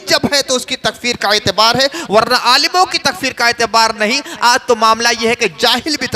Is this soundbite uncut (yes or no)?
yes